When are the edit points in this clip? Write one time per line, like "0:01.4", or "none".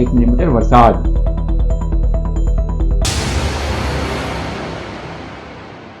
0:03.0